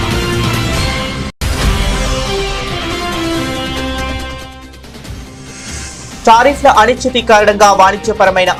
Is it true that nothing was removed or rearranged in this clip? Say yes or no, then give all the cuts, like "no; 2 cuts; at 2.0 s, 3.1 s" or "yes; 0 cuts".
yes; 0 cuts